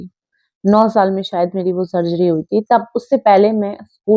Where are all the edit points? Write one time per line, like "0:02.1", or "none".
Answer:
none